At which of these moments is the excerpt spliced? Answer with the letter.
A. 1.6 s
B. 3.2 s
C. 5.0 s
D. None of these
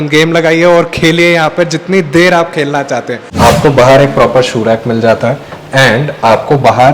B